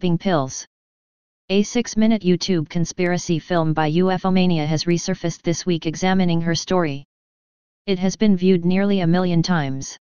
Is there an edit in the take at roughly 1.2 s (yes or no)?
yes